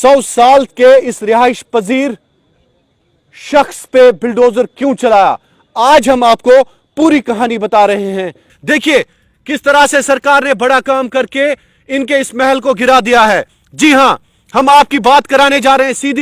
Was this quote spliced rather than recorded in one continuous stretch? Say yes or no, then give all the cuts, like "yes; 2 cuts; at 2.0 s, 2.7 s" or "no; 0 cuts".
no; 0 cuts